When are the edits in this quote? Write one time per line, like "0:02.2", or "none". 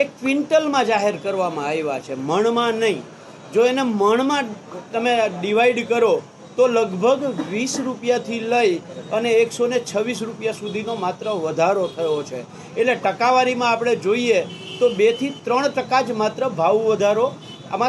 none